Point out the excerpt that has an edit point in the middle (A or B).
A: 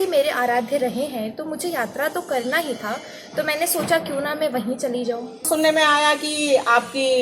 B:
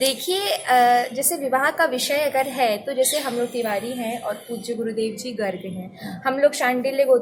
A